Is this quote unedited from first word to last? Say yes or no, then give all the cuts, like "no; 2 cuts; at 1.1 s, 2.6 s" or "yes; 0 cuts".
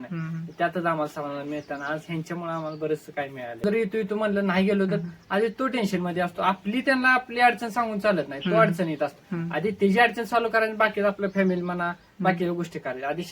no; 1 cut; at 3.6 s